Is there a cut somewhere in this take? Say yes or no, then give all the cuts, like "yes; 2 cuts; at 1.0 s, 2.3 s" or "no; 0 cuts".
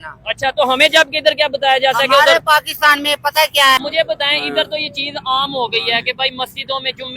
yes; 1 cut; at 3.8 s